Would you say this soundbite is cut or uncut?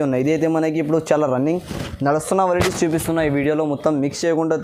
uncut